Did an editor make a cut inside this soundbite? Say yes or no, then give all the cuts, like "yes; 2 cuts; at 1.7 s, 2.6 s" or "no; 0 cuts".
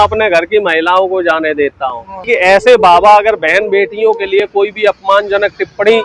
yes; 1 cut; at 2.3 s